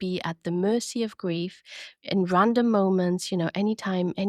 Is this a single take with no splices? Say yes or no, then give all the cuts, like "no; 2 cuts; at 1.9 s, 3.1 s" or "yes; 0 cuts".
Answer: yes; 0 cuts